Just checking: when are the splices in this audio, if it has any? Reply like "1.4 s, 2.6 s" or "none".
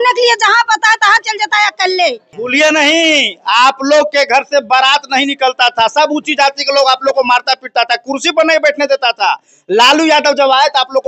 2.3 s